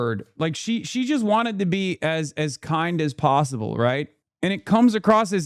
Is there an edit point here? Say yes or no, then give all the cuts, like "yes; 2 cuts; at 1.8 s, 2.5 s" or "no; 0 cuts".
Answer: yes; 1 cut; at 4.2 s